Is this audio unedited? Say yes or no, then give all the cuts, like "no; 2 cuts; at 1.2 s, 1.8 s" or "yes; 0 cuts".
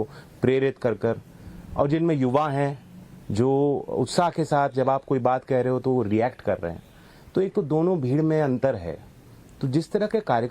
no; 1 cut; at 5.8 s